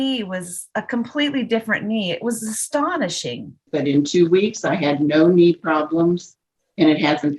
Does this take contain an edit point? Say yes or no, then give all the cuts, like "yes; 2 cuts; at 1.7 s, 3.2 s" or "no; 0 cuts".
yes; 1 cut; at 3.6 s